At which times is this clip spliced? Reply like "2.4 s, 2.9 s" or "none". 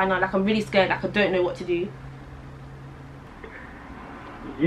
3.3 s

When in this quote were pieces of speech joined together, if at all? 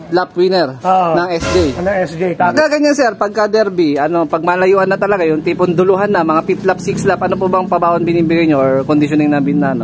2.5 s

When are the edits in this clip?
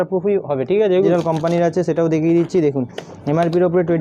1.1 s

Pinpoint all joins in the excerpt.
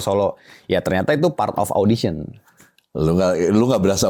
none

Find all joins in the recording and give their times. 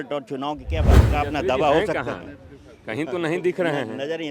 1.0 s

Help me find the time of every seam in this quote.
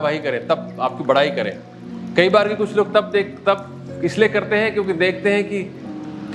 none

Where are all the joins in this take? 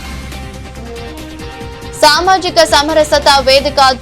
1.0 s

